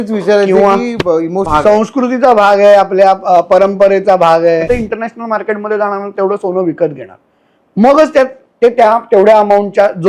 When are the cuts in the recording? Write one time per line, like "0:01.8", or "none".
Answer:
0:01.5
0:04.6